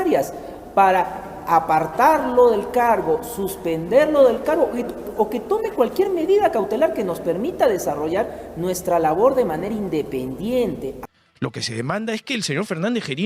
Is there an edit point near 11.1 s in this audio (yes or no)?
yes